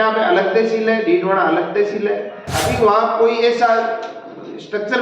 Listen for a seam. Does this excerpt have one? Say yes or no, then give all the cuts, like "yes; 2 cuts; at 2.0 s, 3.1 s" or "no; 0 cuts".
yes; 1 cut; at 2.6 s